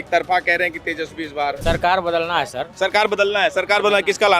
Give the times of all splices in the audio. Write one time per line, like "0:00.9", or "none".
0:01.6